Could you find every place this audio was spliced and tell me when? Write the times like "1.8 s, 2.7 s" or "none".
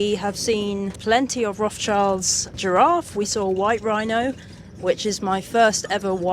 0.9 s, 2.6 s